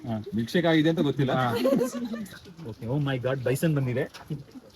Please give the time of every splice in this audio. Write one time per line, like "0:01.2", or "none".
0:02.2